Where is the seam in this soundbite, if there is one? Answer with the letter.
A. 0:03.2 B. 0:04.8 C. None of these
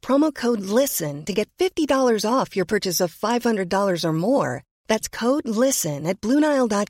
C